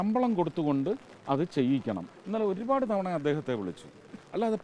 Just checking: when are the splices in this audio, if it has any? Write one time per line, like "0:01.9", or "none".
0:01.1
0:02.1